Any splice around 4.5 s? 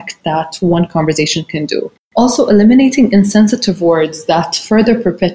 no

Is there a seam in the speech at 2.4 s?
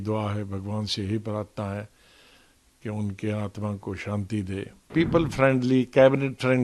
no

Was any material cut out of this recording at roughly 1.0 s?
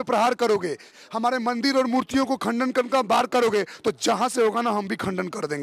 yes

